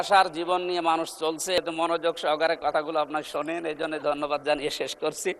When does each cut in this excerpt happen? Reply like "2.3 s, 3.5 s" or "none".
1.6 s